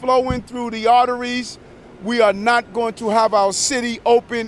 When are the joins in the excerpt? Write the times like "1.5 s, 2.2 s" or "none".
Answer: none